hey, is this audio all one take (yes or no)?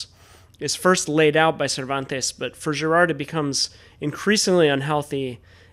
yes